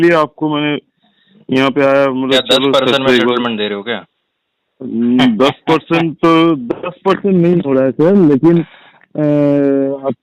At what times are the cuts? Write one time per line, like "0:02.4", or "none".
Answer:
none